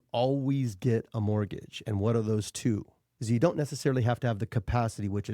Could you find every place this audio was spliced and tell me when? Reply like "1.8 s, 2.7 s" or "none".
3.2 s